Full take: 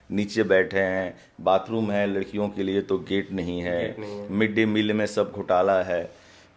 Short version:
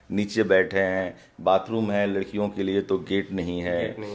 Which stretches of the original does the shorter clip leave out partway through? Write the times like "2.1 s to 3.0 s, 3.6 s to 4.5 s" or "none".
none